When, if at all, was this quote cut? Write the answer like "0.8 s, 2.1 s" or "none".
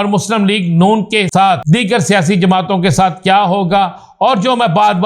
1.4 s